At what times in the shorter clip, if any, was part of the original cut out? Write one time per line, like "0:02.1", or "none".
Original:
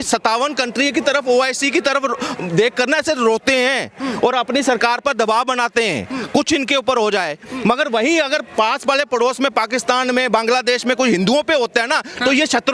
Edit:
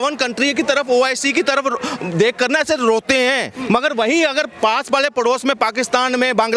0:03.5